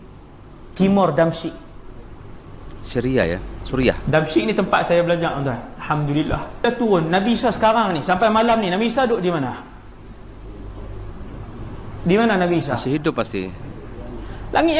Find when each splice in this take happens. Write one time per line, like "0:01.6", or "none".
0:06.6